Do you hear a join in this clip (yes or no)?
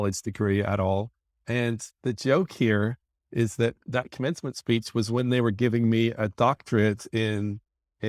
yes